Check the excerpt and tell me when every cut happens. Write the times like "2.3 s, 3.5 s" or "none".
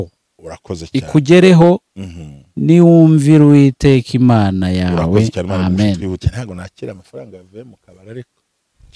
6.3 s